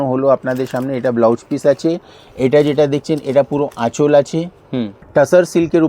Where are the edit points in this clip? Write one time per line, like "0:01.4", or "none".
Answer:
0:05.0